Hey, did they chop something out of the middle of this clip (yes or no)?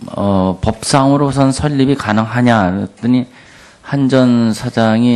no